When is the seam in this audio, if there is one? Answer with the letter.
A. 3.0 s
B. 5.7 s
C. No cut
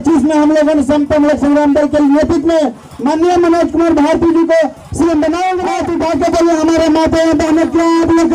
B